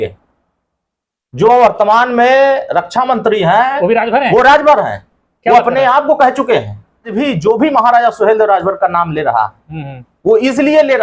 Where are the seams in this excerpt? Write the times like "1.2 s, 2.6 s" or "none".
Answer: 7.1 s